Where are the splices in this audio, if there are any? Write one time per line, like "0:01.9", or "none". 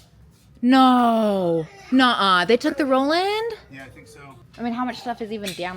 0:01.8
0:04.5